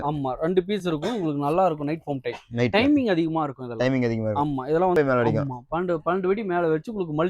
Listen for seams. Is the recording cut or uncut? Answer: cut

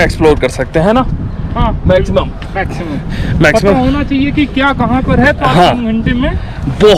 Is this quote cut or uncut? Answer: uncut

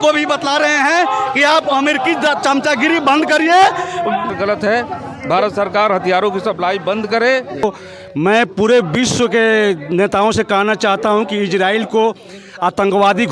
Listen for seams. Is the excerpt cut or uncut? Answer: cut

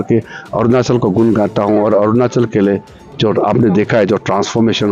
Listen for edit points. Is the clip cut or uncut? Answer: uncut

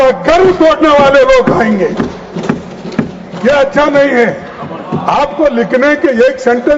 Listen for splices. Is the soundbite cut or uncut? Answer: uncut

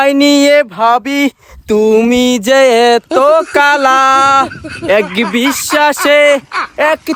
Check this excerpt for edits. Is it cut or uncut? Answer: uncut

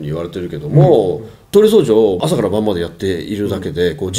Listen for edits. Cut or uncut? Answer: cut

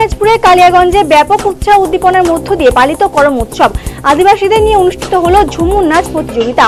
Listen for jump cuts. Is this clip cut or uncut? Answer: uncut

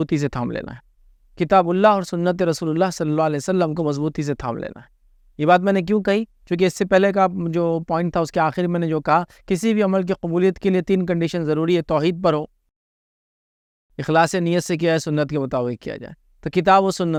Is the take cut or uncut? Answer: uncut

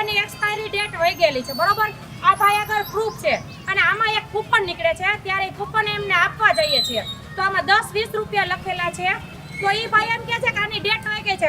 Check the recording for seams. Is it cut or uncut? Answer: uncut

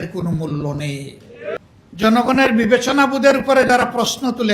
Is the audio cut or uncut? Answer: cut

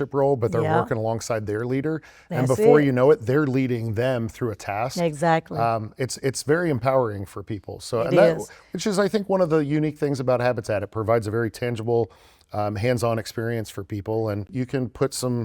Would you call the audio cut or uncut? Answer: cut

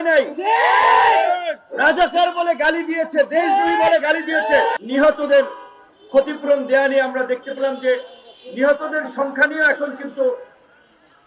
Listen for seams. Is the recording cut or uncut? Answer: cut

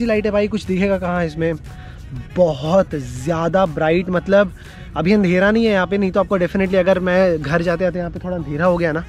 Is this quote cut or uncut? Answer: uncut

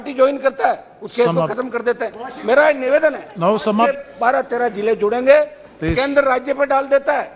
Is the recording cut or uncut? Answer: cut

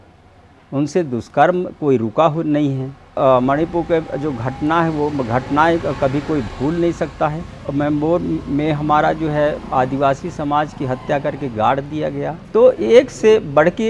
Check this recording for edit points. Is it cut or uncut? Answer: cut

